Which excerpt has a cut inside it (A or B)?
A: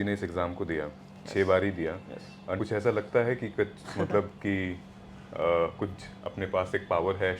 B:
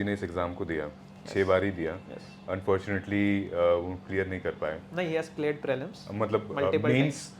A